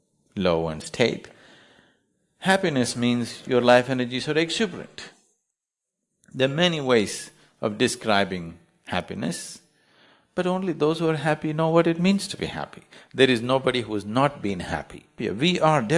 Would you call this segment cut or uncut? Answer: cut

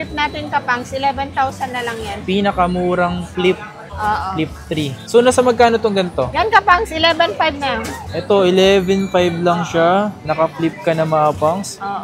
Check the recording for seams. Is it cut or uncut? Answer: uncut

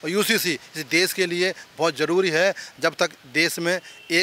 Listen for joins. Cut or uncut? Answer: uncut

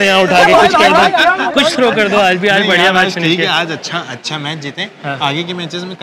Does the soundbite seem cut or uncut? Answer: uncut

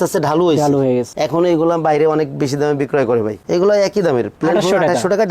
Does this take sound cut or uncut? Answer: cut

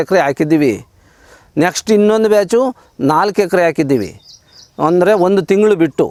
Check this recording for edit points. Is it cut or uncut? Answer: uncut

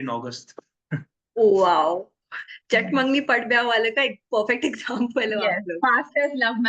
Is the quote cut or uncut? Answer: uncut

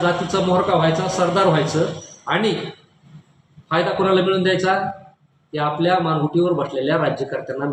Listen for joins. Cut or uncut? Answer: uncut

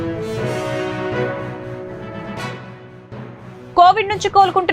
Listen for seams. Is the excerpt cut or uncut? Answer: cut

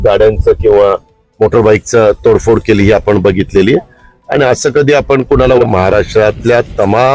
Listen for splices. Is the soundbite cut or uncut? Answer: cut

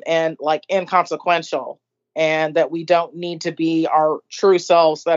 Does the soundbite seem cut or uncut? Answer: uncut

